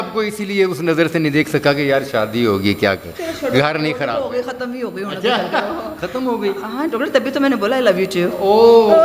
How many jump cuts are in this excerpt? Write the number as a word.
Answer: zero